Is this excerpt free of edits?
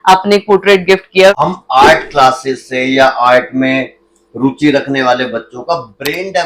no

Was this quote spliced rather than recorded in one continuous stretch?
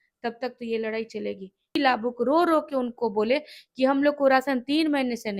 yes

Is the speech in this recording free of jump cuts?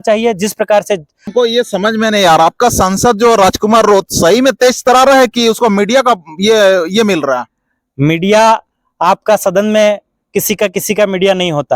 no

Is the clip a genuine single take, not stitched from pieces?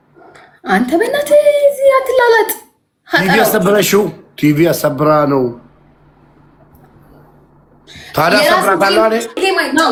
yes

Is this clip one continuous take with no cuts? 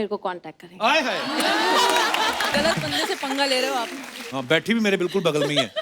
no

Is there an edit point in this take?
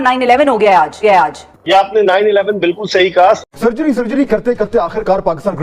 yes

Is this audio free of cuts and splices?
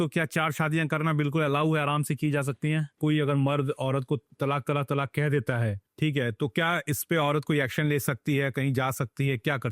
no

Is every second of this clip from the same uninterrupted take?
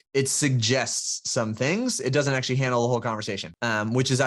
yes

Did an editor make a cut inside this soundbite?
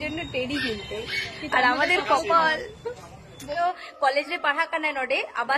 yes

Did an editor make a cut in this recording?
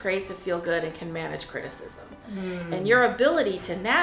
no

